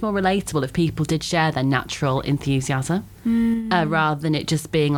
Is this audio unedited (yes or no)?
yes